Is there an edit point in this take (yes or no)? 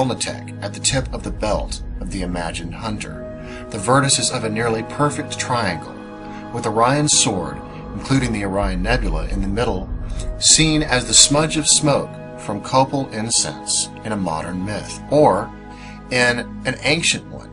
yes